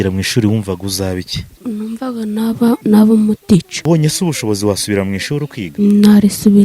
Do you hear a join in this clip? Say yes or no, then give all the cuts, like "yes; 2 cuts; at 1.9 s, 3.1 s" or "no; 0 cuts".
yes; 4 cuts; at 1.6 s, 2.8 s, 3.7 s, 5.6 s